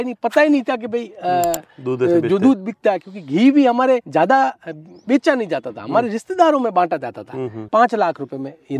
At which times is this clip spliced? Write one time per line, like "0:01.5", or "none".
0:07.7